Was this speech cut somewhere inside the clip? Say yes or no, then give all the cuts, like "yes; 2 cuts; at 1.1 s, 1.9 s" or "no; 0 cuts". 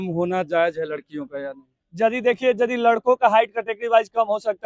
no; 0 cuts